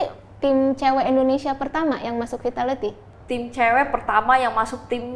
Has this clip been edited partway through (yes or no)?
yes